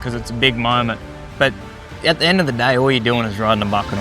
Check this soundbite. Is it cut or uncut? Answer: cut